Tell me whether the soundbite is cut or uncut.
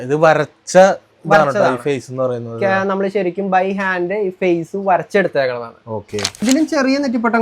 cut